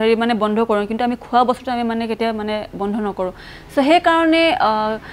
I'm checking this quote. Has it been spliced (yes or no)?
no